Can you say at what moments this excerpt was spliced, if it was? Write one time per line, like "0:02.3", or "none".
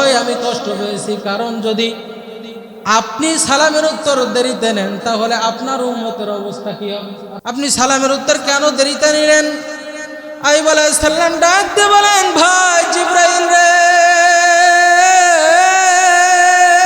0:07.3